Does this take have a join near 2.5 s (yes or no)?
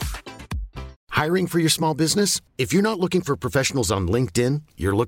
no